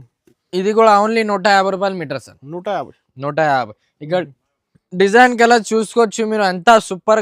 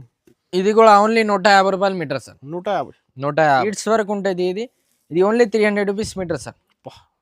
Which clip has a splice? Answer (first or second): second